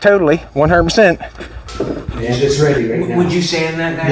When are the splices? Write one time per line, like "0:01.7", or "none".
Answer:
0:02.1

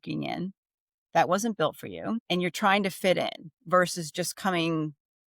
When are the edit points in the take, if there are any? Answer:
0:02.2

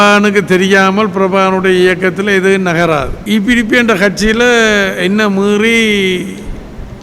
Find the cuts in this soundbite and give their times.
0:03.1

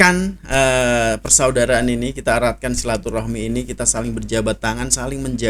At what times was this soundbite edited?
none

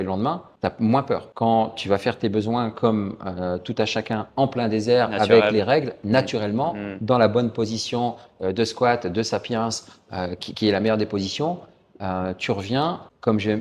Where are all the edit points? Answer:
none

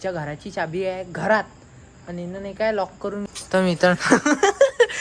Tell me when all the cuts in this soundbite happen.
0:03.3

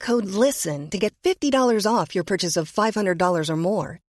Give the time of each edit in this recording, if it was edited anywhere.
none

